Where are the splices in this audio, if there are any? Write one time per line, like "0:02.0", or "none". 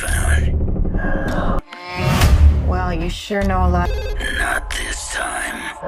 none